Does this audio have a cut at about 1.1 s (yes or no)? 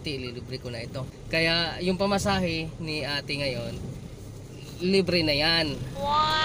yes